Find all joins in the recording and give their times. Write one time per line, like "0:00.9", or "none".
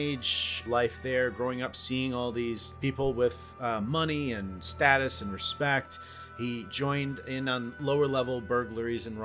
0:02.7